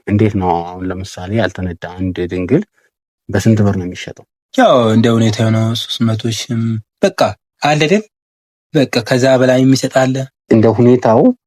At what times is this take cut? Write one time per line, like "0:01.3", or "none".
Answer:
0:10.5